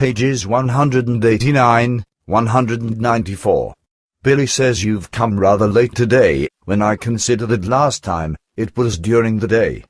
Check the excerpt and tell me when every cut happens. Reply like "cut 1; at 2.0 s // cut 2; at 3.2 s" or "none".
none